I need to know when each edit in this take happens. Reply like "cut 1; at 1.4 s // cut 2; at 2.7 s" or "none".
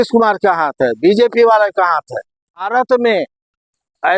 cut 1; at 2.7 s